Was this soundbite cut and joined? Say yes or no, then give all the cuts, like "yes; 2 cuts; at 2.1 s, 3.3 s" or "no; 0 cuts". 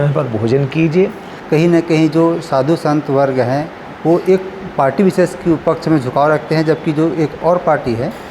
yes; 1 cut; at 1.3 s